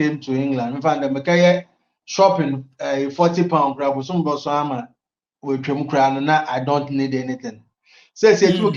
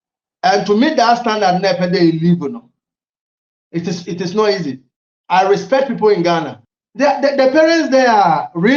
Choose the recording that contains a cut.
second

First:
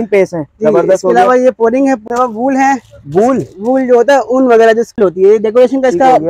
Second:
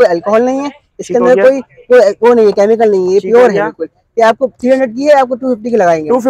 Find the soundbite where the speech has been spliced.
first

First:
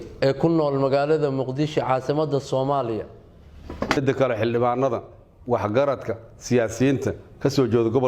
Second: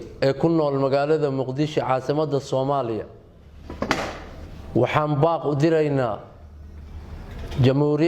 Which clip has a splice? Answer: first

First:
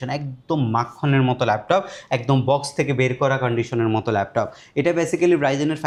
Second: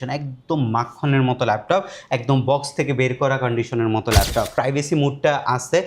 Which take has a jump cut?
second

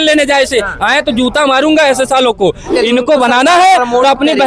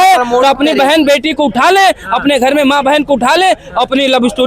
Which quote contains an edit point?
first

